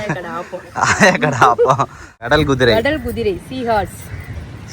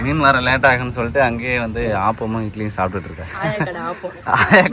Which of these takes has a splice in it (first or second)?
first